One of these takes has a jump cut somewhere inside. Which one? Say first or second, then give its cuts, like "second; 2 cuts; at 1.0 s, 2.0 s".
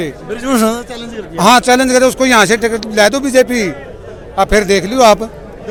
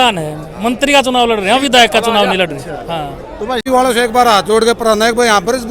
second; 1 cut; at 3.6 s